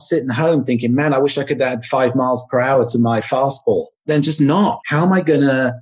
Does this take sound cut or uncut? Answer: cut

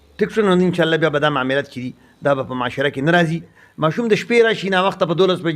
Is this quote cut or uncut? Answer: cut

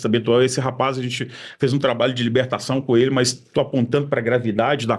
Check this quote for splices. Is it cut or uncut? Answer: uncut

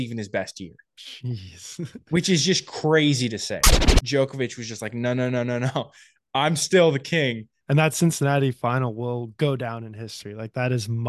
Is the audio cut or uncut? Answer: cut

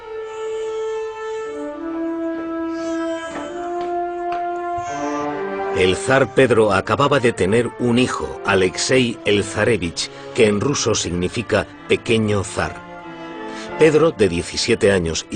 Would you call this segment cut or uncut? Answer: cut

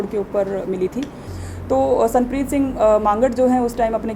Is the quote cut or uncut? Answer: cut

